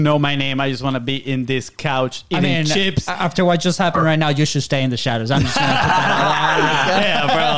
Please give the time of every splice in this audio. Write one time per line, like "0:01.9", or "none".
none